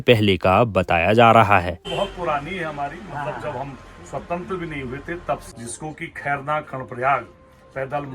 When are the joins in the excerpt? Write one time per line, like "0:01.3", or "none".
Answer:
0:01.9
0:05.5